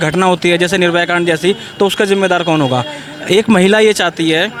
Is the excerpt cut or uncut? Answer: uncut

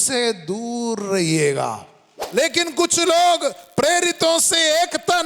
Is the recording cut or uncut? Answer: cut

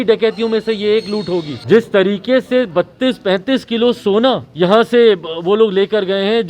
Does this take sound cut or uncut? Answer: cut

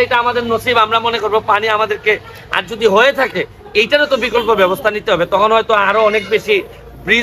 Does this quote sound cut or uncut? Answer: uncut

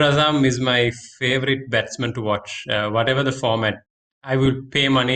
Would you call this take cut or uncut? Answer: uncut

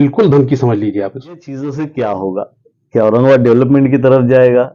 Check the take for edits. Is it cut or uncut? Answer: cut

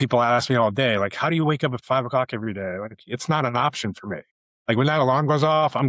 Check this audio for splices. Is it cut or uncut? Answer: uncut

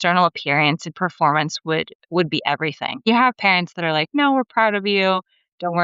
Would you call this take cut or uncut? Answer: cut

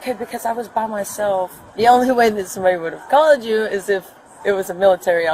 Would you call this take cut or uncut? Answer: cut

